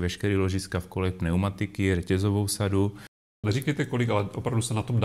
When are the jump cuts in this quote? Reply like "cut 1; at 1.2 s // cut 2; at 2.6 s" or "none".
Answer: cut 1; at 3.3 s